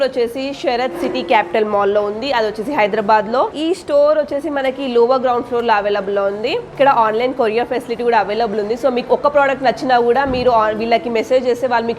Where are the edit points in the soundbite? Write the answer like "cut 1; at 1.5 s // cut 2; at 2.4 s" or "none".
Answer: cut 1; at 3.6 s // cut 2; at 6.7 s